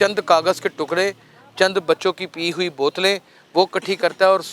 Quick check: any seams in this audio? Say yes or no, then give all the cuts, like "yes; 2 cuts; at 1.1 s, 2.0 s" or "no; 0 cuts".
no; 0 cuts